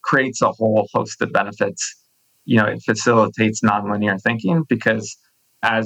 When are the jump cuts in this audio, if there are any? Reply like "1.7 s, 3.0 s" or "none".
2.3 s